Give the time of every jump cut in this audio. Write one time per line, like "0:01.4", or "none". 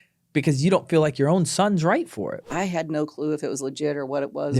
0:02.4